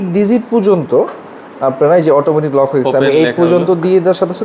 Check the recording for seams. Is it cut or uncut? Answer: uncut